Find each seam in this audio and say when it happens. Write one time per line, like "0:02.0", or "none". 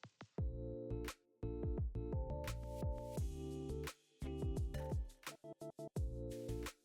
0:05.9